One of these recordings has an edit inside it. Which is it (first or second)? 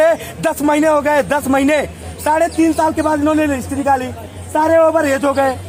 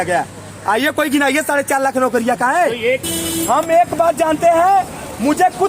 second